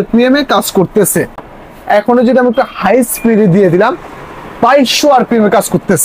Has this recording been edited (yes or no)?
no